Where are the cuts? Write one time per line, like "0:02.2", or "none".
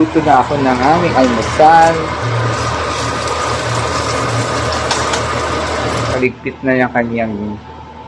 0:06.1